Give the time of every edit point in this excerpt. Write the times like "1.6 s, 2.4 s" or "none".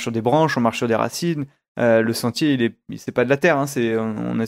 none